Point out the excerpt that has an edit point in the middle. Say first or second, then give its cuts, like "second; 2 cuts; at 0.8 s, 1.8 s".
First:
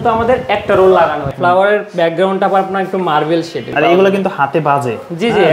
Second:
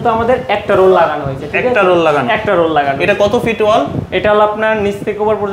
first; 2 cuts; at 1.3 s, 3.7 s